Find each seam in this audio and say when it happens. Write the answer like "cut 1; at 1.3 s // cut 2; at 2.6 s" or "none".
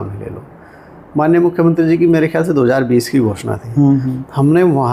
none